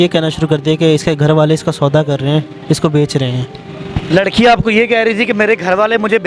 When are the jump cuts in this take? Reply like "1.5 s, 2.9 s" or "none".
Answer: none